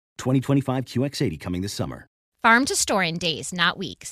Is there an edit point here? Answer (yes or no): yes